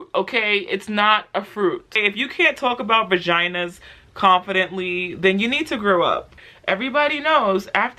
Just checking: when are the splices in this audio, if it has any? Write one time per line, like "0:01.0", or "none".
0:02.0
0:06.3